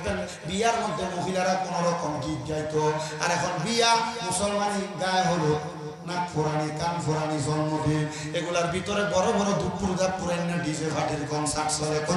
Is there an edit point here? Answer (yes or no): no